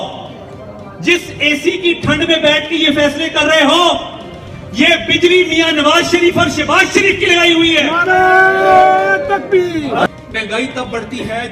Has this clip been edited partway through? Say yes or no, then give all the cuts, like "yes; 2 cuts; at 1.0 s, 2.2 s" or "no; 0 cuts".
yes; 1 cut; at 10.1 s